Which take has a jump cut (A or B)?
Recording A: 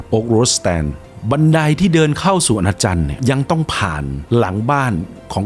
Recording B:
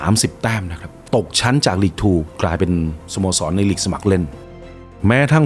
B